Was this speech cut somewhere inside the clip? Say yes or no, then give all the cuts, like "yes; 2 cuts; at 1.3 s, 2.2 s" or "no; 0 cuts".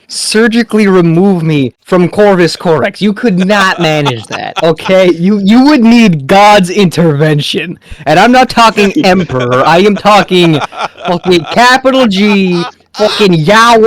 yes; 1 cut; at 1.8 s